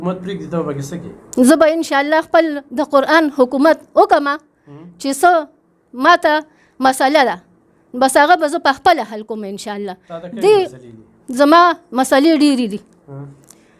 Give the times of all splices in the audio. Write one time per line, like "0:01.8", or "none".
none